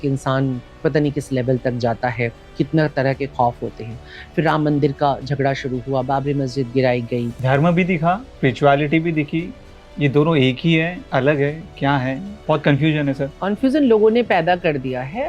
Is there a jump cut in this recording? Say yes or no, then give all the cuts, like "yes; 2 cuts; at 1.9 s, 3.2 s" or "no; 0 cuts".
yes; 4 cuts; at 7.3 s, 8.3 s, 12.3 s, 13.3 s